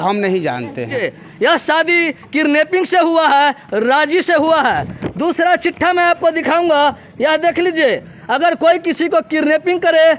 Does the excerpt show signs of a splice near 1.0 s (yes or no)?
yes